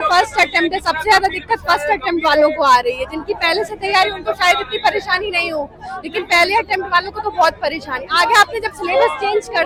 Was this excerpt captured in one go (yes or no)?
yes